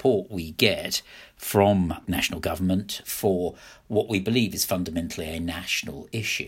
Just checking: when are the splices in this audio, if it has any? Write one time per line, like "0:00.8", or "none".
0:02.0
0:03.0

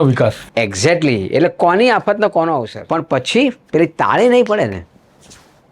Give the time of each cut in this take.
0:02.8

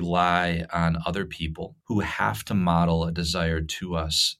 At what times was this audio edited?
0:01.7

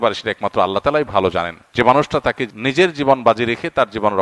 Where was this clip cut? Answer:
0:01.6
0:02.5

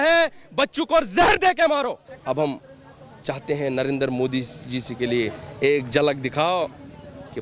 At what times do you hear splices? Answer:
0:02.1

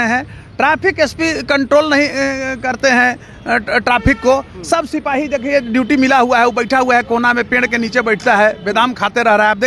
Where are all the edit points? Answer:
none

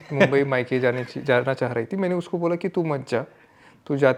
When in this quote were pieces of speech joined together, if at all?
none

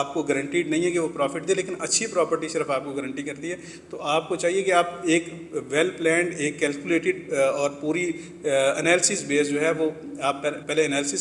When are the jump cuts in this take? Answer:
none

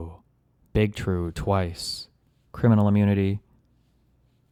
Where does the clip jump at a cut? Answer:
none

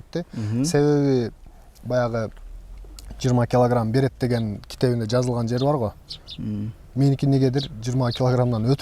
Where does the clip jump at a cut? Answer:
none

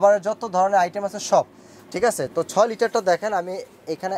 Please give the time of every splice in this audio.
none

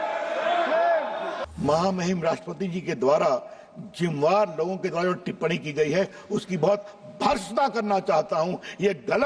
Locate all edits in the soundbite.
0:01.4

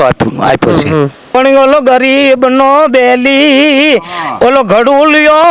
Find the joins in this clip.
0:01.2

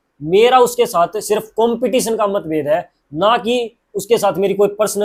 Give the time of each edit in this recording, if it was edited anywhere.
none

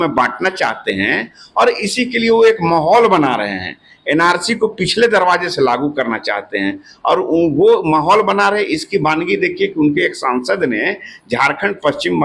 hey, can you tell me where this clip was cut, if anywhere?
none

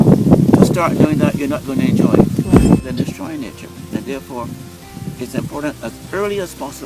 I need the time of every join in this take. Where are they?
0:02.9

